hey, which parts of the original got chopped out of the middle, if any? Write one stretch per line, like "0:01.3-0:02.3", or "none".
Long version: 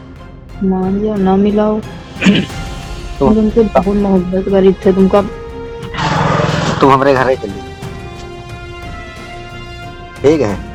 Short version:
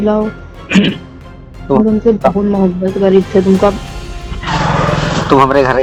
none

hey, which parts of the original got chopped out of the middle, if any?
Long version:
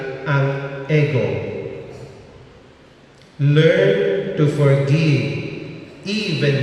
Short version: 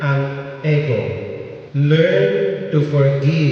0:01.8-0:03.2

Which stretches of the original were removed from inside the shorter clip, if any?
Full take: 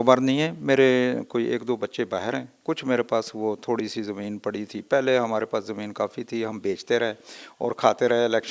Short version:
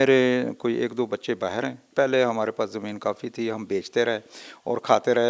0:02.5-0:04.8

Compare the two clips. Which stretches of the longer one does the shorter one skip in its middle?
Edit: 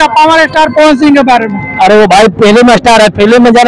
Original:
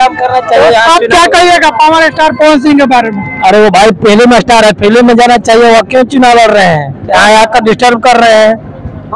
none

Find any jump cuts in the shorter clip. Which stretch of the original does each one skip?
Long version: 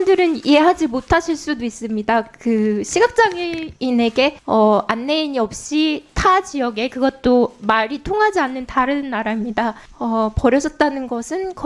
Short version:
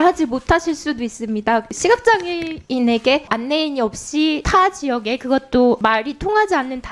0:02.3-0:02.8
0:04.4-0:04.9
0:06.0-0:06.1
0:07.5-0:07.6

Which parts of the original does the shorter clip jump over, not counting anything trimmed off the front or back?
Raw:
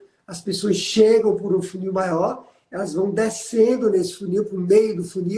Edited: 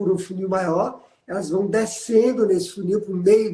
none

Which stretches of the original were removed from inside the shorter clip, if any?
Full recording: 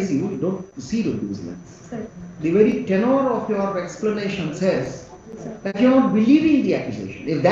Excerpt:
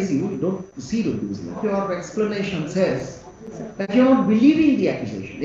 0:01.6-0:03.4

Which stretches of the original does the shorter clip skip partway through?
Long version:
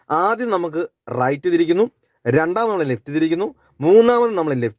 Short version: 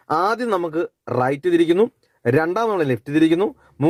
none

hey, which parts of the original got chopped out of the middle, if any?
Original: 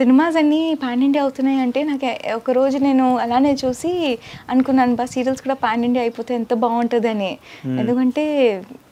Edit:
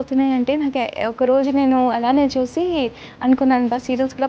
none

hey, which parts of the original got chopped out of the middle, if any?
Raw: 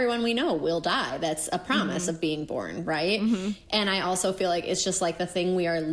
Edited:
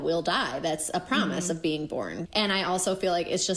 0:02.8-0:03.6

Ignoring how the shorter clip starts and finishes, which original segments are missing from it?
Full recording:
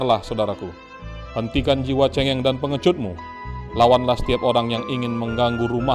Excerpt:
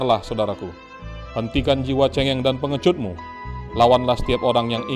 none

